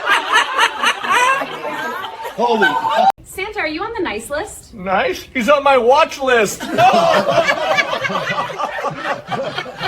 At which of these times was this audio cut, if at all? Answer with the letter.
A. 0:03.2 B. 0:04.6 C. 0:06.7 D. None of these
A